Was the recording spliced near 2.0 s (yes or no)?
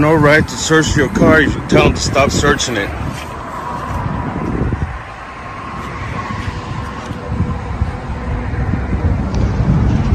no